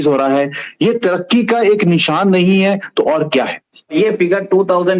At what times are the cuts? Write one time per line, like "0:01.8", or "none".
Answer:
0:03.9